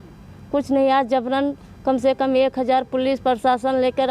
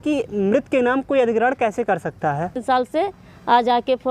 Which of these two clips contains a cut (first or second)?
second